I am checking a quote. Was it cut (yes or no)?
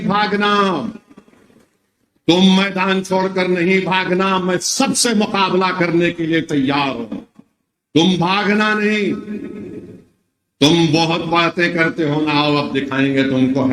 no